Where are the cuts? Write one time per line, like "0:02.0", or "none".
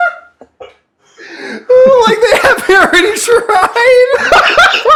none